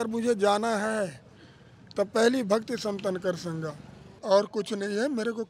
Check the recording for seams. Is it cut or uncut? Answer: cut